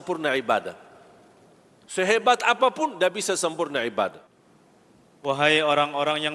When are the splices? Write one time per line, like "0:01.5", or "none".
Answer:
0:04.2